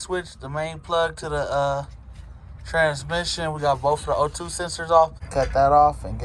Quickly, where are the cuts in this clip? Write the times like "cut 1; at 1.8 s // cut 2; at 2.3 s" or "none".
cut 1; at 5.2 s